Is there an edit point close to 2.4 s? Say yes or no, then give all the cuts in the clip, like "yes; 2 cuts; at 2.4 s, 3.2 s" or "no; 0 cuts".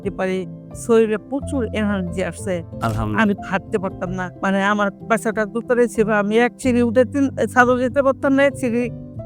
no; 1 cut; at 4.3 s